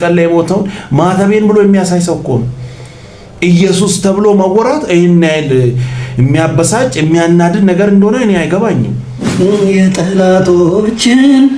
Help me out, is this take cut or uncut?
cut